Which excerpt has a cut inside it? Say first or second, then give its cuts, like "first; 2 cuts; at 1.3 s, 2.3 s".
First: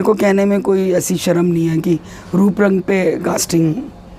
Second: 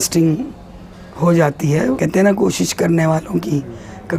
second; 1 cut; at 2.0 s